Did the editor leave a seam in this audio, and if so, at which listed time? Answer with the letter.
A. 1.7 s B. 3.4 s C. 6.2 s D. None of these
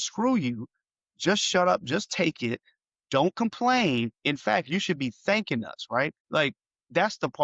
C